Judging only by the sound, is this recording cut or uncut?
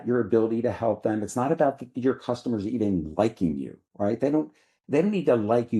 uncut